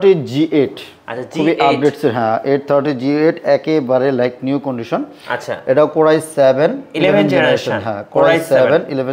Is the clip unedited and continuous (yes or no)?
yes